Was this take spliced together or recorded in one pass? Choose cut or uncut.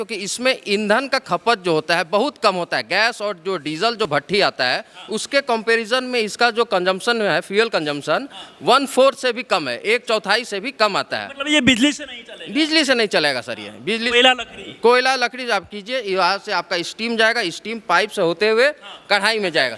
uncut